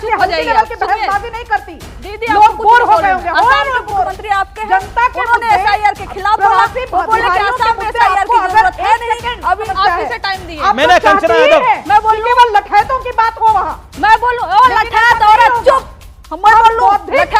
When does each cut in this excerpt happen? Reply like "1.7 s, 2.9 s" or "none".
9.7 s, 13.8 s